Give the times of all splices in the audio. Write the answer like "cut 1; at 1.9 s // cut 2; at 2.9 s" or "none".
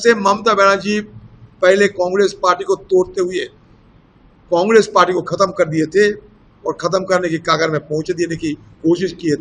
none